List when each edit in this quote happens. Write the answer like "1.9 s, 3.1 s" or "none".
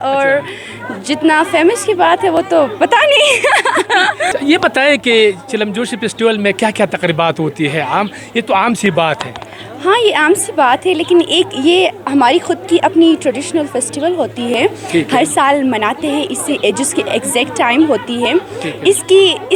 none